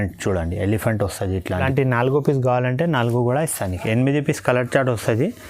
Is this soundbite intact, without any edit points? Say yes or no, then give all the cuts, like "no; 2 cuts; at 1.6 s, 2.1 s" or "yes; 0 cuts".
no; 1 cut; at 1.6 s